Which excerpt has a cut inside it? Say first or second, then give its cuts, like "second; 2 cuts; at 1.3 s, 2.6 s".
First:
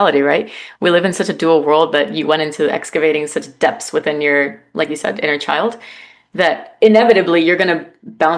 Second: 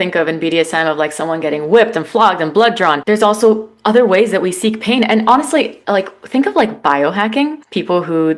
second; 1 cut; at 3.0 s